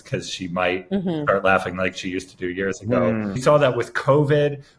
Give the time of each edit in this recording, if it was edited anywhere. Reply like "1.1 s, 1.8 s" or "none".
3.4 s